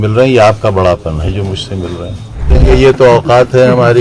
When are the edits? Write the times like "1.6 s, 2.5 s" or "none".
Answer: 2.6 s